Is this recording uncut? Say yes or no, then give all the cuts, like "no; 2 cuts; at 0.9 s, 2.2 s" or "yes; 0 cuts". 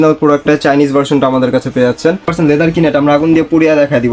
no; 1 cut; at 2.3 s